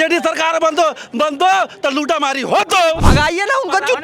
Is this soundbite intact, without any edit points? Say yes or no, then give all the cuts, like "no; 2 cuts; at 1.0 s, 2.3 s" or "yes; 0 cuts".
no; 1 cut; at 3.0 s